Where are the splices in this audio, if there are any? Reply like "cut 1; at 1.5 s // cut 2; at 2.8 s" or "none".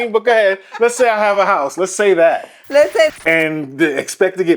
cut 1; at 3.1 s